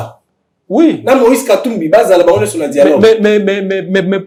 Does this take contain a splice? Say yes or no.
no